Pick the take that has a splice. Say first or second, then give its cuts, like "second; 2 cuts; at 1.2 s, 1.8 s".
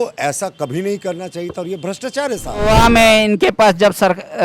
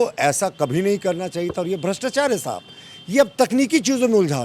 first; 1 cut; at 2.6 s